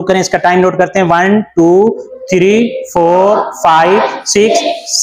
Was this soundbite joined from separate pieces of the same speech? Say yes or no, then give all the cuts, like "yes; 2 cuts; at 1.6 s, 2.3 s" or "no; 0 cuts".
no; 0 cuts